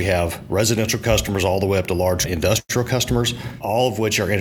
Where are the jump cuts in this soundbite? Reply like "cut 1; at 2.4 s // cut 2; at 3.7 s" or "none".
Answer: cut 1; at 2.3 s // cut 2; at 3.5 s